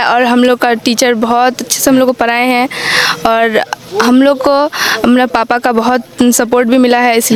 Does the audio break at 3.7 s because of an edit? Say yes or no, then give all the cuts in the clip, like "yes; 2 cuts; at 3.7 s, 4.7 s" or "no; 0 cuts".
no; 0 cuts